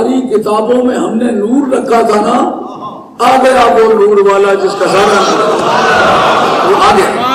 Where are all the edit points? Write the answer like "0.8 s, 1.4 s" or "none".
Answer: none